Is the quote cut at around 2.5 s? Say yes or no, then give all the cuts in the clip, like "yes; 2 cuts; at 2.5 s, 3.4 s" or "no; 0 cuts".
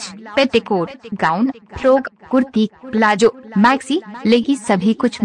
no; 1 cut; at 4.0 s